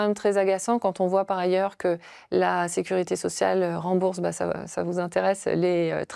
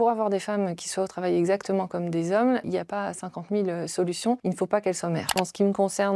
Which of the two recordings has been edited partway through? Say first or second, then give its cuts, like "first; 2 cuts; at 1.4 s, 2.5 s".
second; 3 cuts; at 2.6 s, 4.4 s, 5.3 s